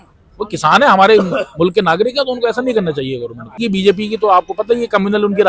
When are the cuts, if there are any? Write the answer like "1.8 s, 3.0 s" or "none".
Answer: 3.6 s